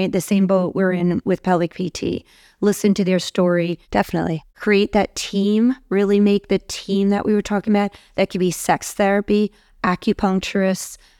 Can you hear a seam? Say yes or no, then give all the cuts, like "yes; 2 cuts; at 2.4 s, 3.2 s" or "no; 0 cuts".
no; 0 cuts